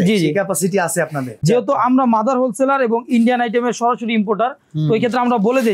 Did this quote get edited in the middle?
yes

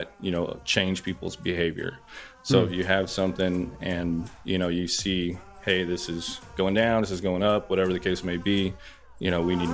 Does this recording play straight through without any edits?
yes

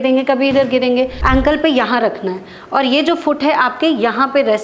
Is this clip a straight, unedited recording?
no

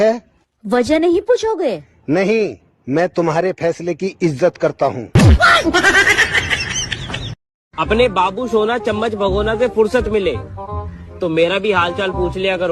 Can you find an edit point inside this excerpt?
yes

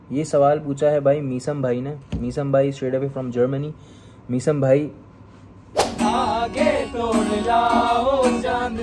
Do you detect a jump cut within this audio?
yes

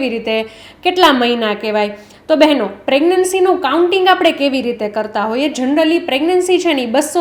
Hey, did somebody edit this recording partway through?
no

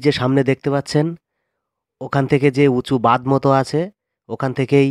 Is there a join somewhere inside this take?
no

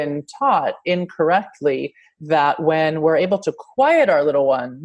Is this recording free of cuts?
yes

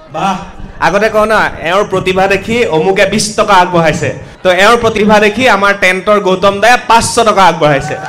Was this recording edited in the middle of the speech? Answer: yes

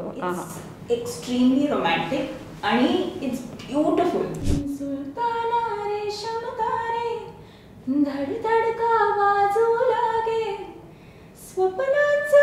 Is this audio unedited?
no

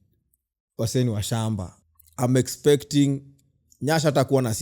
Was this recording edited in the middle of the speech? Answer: yes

